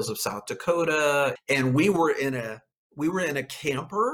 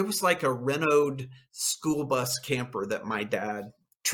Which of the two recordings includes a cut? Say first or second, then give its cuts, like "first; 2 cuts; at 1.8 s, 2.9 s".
first; 1 cut; at 1.4 s